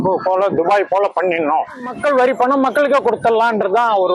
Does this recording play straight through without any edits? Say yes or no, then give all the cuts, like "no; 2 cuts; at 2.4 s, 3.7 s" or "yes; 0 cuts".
no; 1 cut; at 1.9 s